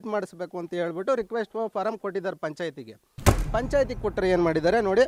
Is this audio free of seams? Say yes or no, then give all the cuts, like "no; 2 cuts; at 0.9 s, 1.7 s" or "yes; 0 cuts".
yes; 0 cuts